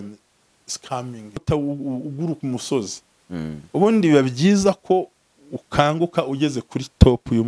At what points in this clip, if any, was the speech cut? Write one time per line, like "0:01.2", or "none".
0:01.4